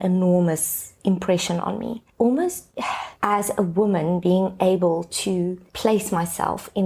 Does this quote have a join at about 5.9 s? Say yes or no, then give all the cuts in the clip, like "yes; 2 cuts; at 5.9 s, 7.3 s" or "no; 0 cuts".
no; 0 cuts